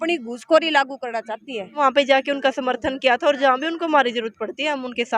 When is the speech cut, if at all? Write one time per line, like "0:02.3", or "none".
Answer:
0:01.8